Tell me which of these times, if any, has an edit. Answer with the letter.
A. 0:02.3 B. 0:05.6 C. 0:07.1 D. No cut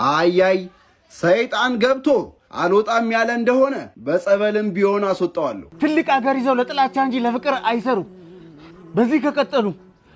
B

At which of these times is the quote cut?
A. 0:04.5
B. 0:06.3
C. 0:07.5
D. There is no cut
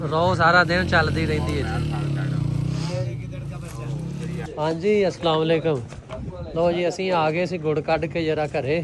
A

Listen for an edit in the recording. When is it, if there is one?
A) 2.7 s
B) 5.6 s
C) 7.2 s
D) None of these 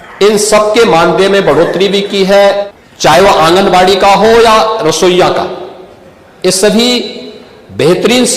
A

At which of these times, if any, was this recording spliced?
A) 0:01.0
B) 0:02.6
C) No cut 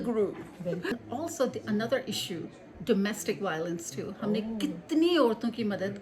A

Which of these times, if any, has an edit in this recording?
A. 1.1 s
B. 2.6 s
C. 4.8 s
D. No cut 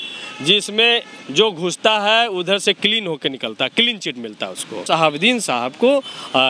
C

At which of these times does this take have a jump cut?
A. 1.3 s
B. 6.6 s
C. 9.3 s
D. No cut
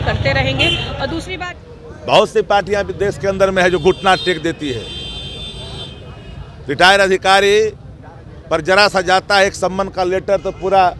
A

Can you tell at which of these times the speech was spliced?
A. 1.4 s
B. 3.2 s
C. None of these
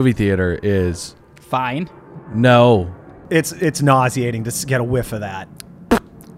B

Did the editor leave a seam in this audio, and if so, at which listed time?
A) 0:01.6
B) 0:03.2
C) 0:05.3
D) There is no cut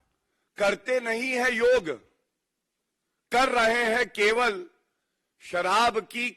D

